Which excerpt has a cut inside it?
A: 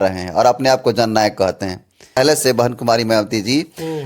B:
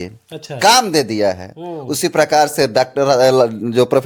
A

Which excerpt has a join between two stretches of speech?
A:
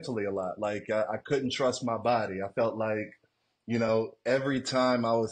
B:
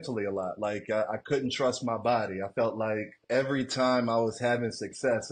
B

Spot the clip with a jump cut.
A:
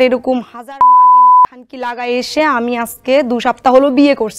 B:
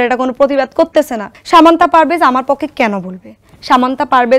B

